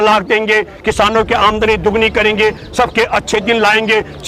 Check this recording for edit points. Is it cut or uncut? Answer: uncut